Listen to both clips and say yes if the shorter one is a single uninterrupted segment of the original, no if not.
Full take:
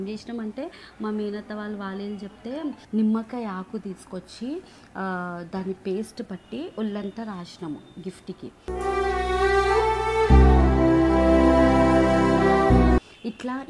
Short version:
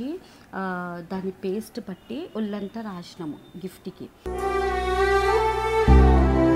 yes